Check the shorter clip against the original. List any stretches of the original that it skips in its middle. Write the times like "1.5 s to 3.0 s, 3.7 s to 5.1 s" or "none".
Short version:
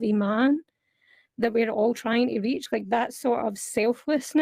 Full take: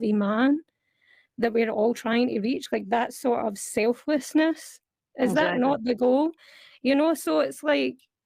none